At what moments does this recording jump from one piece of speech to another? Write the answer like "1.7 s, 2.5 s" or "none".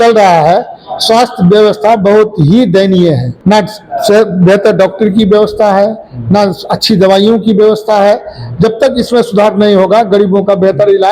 3.3 s